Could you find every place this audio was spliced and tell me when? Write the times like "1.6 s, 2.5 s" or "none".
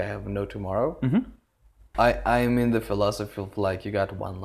1.9 s